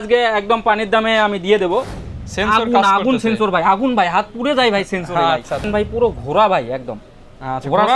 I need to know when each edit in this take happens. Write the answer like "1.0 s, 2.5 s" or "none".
2.0 s, 5.6 s